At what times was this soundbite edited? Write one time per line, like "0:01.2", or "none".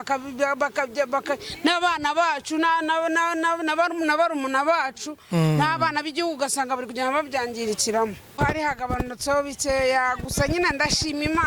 0:08.4